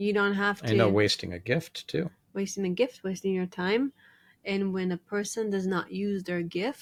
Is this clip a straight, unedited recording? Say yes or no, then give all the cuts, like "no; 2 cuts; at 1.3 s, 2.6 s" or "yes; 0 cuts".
yes; 0 cuts